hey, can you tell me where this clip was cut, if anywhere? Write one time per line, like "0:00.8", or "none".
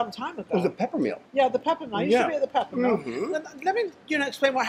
none